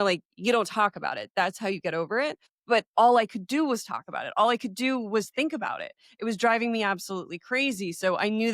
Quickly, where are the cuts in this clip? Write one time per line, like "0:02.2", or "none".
0:02.5